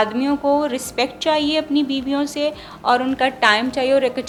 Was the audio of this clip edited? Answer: no; 0 cuts

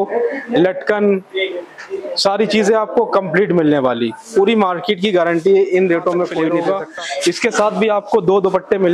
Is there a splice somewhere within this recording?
yes; 1 cut; at 6.6 s

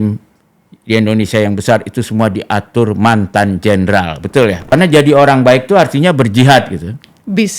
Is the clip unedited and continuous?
no; 1 cut; at 4.7 s

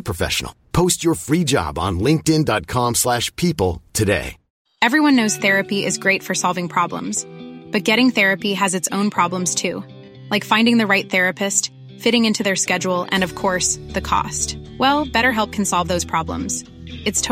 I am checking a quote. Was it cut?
yes; 1 cut; at 4.5 s

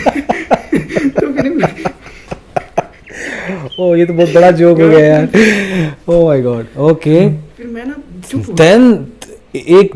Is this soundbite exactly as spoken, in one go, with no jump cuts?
yes; 0 cuts

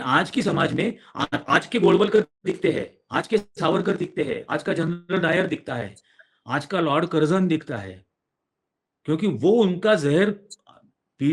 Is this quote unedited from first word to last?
yes; 0 cuts

